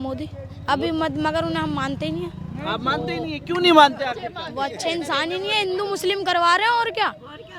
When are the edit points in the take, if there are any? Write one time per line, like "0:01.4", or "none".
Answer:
none